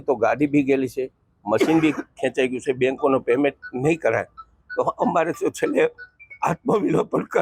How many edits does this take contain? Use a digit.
0